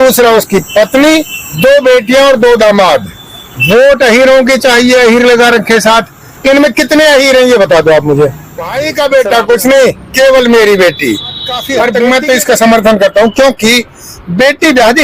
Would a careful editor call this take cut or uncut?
cut